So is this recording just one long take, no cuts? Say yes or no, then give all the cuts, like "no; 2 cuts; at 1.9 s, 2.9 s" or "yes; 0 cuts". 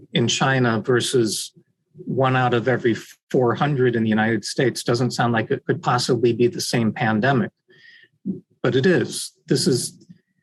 yes; 0 cuts